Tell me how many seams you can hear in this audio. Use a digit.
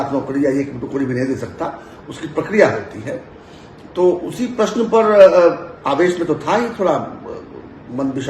0